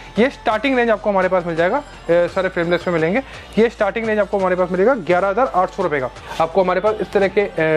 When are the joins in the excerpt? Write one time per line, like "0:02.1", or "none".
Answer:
0:06.2

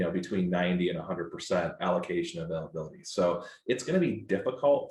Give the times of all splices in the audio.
none

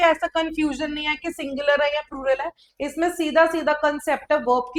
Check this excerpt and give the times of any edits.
none

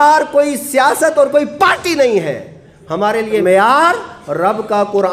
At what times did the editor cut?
0:03.4

